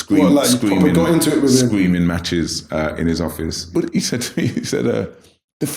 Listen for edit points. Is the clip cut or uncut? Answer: cut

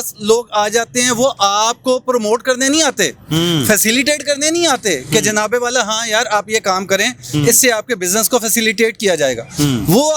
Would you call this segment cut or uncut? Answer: uncut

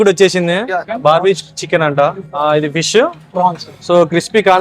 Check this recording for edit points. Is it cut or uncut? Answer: cut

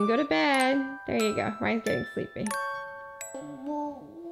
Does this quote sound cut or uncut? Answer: cut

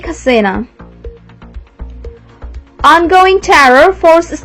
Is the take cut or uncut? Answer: cut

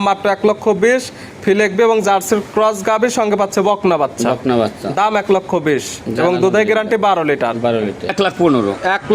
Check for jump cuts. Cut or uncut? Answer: cut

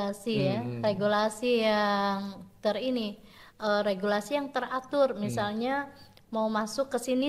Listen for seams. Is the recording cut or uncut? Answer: uncut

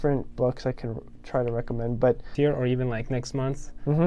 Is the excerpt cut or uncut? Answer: cut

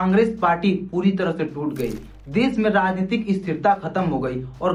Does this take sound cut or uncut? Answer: uncut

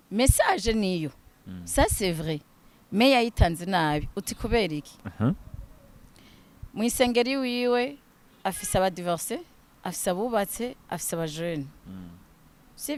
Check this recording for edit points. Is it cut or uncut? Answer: uncut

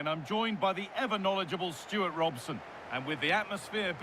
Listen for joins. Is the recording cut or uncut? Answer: cut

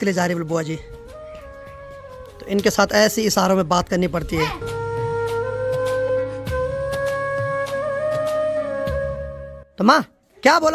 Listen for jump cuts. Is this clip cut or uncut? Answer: uncut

